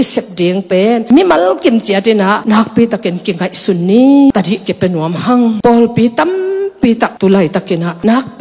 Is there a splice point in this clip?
yes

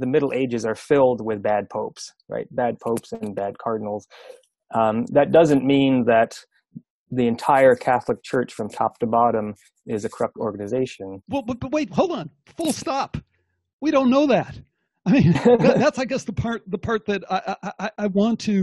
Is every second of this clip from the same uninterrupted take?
yes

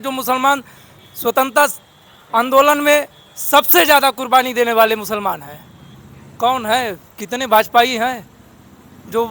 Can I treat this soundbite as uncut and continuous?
yes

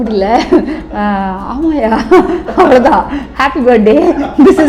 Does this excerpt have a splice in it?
no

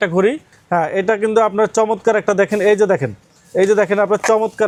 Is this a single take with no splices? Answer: yes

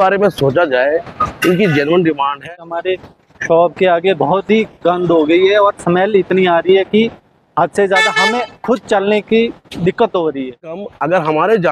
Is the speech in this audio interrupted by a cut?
yes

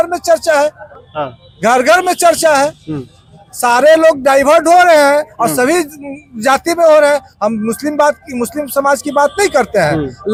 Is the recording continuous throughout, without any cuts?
yes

